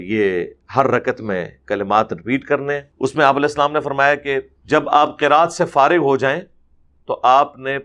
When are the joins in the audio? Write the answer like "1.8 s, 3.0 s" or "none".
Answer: 2.9 s, 4.5 s